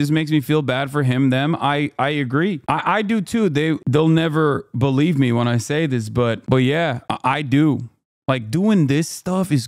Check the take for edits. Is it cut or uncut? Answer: uncut